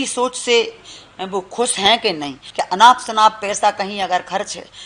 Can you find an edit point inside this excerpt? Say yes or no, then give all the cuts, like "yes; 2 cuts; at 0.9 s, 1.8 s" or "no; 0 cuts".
yes; 1 cut; at 2.4 s